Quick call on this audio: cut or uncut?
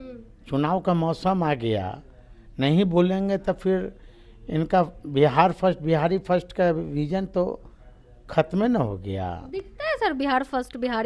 uncut